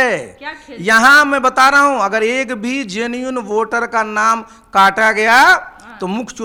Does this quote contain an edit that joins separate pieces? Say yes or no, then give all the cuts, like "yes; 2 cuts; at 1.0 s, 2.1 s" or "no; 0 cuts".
no; 0 cuts